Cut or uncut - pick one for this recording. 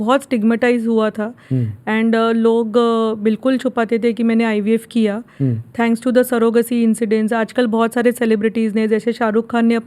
uncut